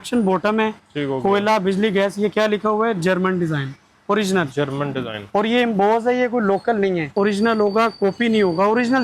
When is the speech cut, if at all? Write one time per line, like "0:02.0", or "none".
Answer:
0:07.1

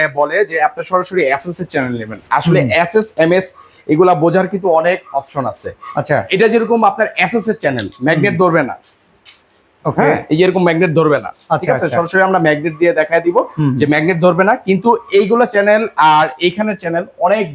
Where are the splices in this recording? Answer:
none

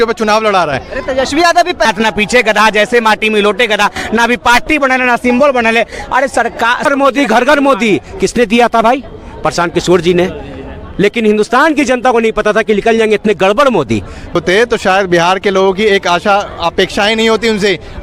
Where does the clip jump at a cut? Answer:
0:01.8
0:06.9
0:14.4

